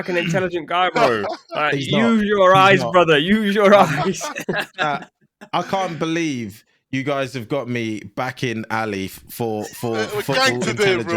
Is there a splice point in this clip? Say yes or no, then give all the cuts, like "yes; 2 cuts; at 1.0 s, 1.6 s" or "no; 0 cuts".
no; 0 cuts